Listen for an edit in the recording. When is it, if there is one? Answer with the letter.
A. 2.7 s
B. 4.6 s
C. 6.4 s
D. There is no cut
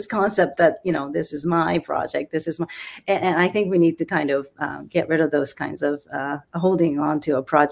D